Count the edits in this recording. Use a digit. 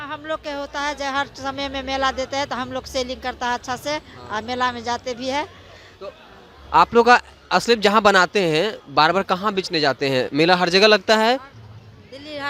0